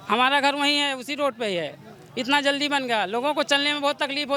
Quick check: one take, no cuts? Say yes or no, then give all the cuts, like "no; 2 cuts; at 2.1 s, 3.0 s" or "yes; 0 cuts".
yes; 0 cuts